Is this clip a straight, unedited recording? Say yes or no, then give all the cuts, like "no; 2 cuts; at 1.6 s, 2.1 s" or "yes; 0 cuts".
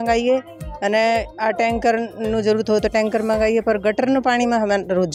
yes; 0 cuts